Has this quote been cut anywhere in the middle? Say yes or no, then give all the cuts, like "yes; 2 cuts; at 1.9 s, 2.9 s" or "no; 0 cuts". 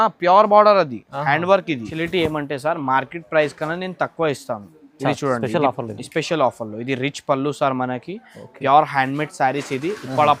yes; 1 cut; at 1.9 s